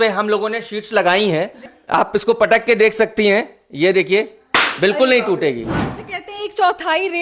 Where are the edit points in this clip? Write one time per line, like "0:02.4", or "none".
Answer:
0:01.7
0:05.9